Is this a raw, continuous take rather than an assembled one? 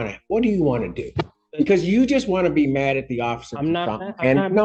yes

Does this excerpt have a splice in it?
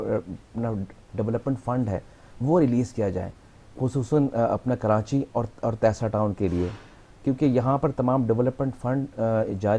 no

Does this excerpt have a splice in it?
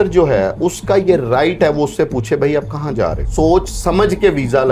yes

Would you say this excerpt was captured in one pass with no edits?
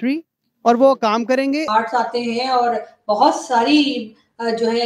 no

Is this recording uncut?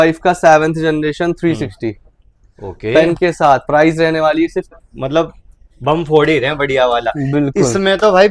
no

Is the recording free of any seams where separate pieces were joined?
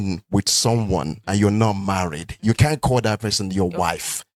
yes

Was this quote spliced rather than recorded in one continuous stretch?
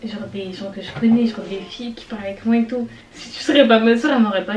no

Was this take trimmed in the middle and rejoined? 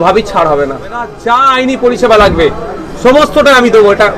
yes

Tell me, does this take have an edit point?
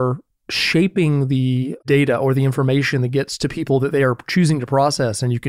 yes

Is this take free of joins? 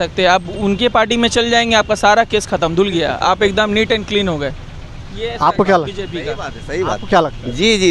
yes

